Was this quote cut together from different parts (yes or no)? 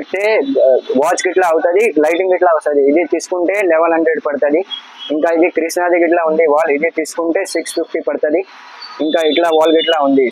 no